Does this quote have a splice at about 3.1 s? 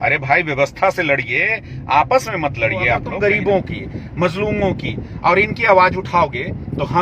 yes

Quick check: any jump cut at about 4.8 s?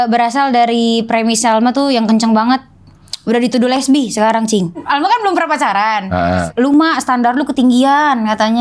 yes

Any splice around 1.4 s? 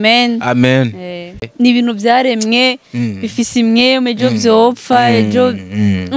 yes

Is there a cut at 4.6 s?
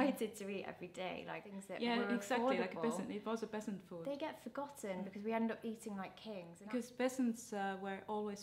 no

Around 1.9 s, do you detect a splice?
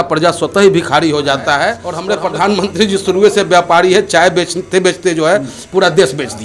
yes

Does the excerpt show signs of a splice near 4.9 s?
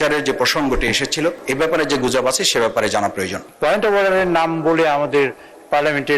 no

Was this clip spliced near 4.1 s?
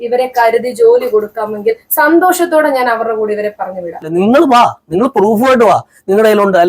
yes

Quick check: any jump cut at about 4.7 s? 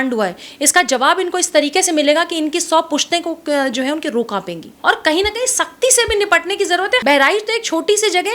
yes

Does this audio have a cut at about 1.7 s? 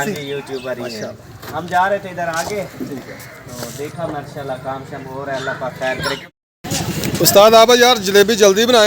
yes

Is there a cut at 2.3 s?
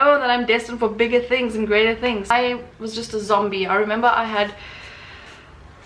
yes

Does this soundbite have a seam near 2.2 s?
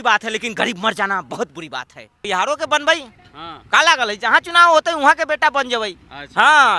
yes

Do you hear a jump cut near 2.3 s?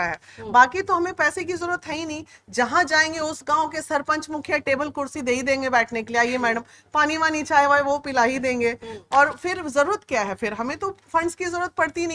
no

